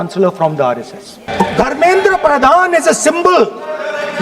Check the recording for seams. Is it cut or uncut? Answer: cut